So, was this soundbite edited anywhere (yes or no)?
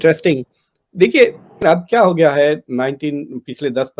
yes